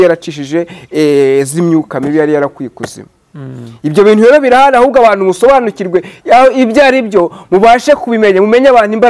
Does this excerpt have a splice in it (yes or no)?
no